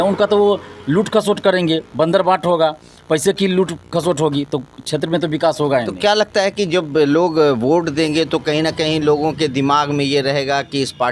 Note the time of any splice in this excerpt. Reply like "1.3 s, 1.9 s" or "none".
none